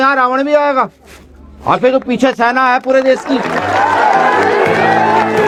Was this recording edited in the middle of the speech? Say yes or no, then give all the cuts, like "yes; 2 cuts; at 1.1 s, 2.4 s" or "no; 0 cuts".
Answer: no; 0 cuts